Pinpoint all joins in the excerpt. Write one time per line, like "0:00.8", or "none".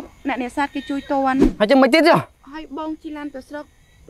0:01.6
0:02.4